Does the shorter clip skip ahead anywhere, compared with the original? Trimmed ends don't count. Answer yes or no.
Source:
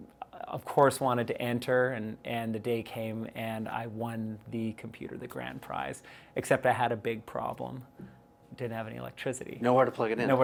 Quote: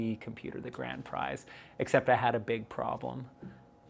no